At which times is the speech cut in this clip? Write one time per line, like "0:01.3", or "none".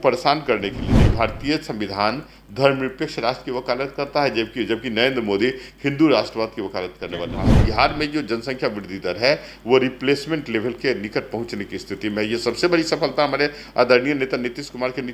0:01.1
0:07.5